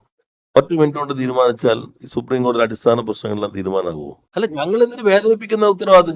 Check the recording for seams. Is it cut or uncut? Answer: cut